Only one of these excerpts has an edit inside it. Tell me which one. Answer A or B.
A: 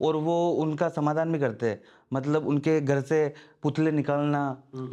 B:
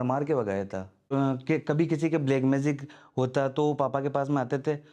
B